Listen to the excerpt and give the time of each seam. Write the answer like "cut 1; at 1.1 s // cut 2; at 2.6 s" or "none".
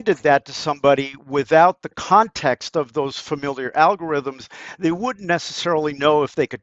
none